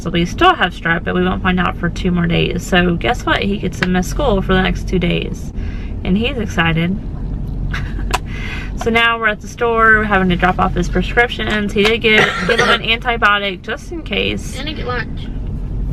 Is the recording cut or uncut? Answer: uncut